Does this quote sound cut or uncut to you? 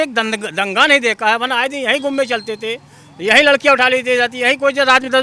uncut